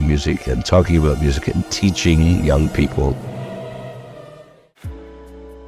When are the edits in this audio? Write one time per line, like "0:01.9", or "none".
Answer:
0:04.8